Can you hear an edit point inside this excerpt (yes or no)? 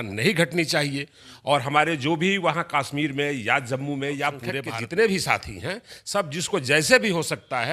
yes